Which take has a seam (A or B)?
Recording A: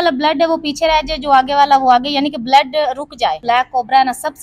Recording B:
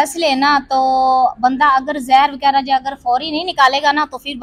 A